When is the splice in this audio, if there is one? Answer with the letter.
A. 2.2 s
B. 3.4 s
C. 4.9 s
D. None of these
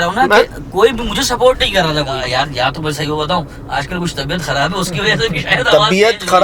A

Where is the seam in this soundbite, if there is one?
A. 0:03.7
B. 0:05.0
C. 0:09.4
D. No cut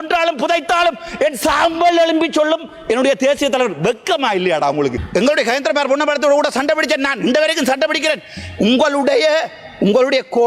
B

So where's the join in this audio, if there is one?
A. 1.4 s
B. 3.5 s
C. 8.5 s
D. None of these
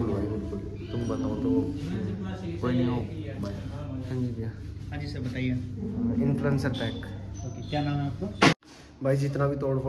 C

